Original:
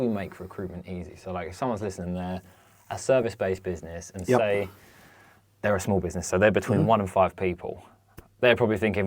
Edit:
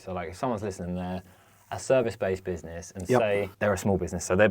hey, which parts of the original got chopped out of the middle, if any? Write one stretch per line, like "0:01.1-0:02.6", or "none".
0:04.7-0:05.5